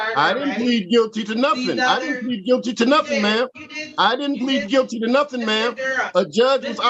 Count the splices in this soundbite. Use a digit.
0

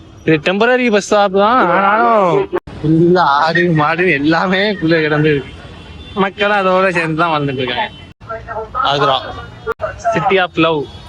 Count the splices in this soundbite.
3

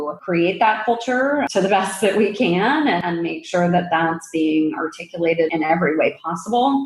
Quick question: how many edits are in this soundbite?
3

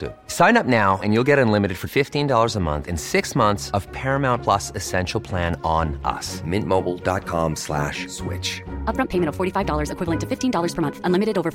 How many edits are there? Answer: 0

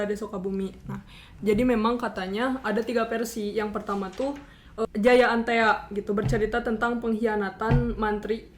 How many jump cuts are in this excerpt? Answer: 1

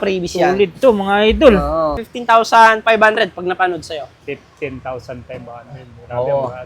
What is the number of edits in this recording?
1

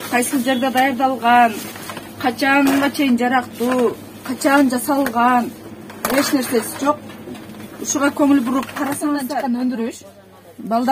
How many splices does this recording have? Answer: 1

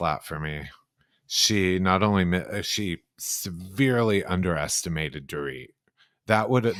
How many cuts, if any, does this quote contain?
0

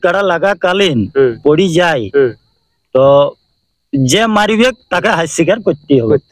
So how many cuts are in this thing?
0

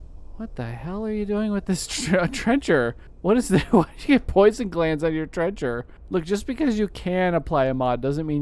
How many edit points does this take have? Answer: 2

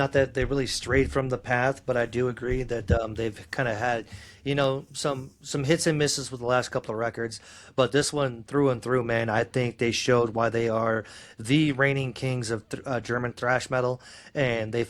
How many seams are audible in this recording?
0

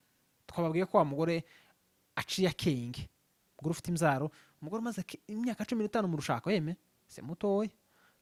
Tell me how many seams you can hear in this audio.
0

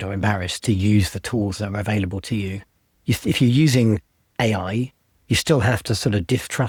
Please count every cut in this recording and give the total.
0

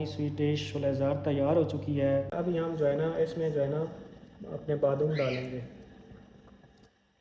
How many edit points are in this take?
1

